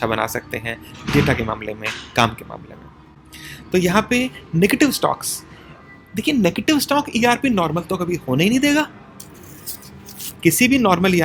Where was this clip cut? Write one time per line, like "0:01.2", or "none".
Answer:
none